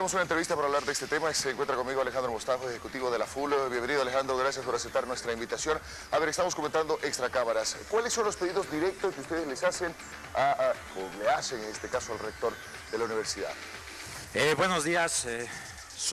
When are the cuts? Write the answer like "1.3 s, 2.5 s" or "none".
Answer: none